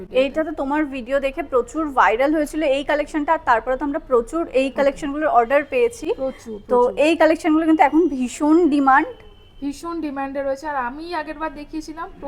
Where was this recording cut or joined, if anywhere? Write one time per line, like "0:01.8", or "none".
none